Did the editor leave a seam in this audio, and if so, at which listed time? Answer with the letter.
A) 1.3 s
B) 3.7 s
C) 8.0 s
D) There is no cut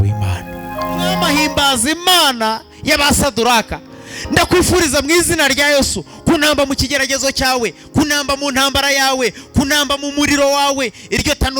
A